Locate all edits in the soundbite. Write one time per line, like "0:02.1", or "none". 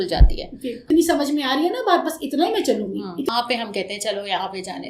0:00.8
0:03.3